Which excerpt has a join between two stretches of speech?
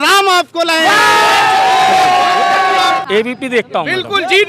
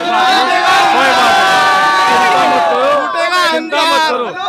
first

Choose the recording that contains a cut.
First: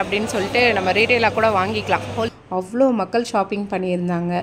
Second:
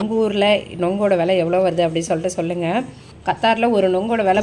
first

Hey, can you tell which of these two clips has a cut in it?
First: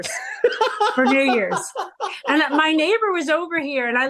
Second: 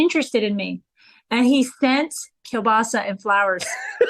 second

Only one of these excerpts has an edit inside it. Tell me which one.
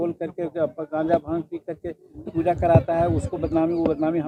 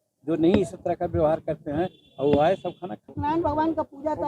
second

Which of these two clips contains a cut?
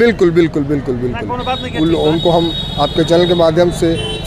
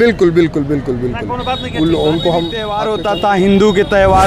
second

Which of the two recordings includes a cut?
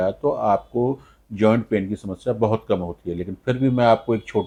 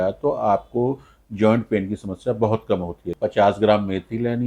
second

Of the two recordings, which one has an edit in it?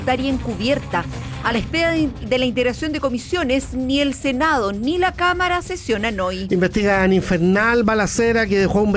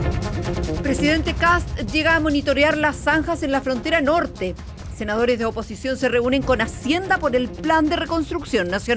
second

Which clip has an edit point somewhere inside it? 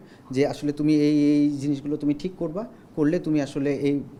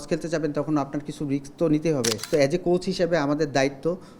second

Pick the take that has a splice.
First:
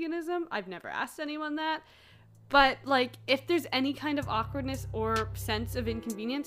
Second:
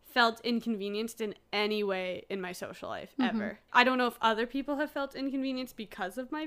second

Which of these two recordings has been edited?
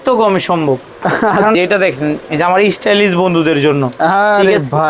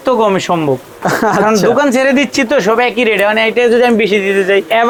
first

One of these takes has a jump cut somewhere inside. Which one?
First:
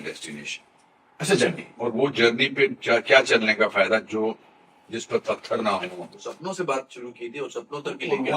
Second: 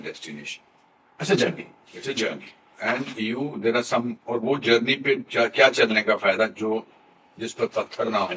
first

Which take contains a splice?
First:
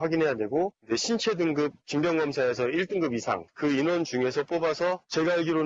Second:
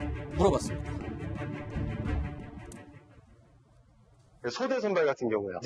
first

